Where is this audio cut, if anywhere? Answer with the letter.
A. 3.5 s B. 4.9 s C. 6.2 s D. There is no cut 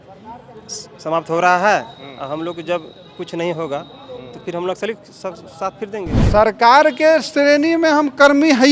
C